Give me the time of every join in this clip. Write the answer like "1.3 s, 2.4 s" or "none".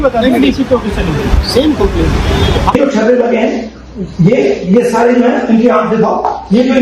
2.7 s